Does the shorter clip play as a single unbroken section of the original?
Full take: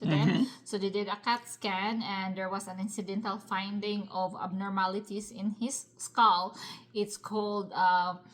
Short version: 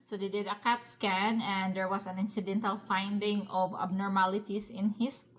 yes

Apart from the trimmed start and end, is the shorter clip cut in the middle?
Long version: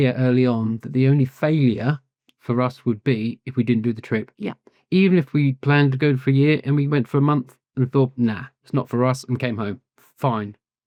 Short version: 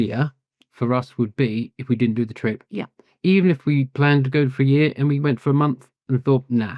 no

